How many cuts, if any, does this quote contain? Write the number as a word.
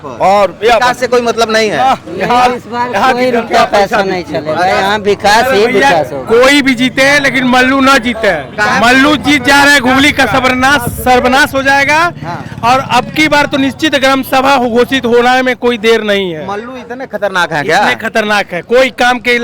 zero